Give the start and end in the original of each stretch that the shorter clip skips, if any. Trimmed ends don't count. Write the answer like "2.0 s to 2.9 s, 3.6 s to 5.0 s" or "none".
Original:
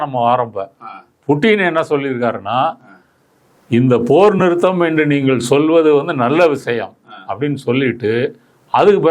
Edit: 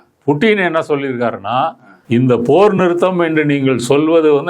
2.9 s to 3.5 s